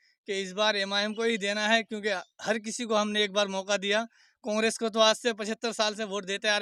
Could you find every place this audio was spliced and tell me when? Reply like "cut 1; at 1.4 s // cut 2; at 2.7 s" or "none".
none